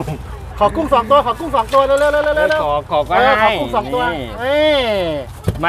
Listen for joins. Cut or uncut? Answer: uncut